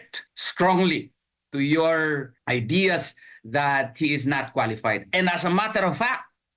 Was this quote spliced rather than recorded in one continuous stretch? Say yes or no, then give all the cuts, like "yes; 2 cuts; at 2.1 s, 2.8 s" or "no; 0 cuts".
yes; 1 cut; at 2.3 s